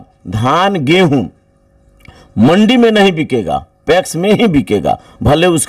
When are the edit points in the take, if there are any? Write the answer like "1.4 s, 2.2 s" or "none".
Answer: none